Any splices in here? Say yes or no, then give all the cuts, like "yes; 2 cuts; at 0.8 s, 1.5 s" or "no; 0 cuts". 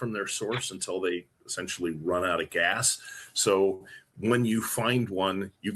no; 0 cuts